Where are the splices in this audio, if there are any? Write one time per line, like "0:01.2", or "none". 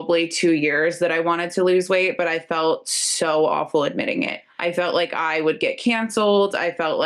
0:04.4